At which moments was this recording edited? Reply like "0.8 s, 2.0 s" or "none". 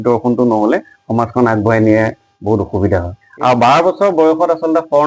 3.2 s